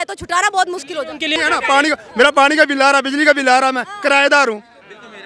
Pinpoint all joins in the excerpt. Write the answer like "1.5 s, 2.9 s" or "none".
1.4 s